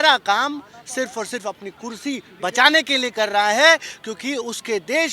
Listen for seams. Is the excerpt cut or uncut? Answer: uncut